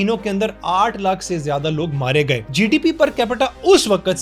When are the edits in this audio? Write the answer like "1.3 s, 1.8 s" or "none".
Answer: 2.4 s

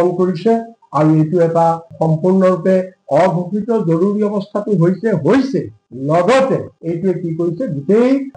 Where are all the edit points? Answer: none

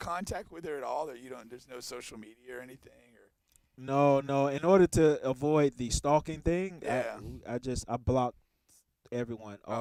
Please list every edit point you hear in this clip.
none

